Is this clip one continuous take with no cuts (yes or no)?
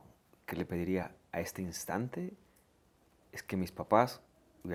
yes